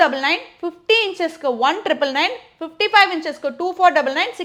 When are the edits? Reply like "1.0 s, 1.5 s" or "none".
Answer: none